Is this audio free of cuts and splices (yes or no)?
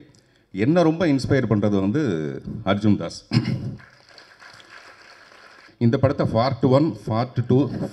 no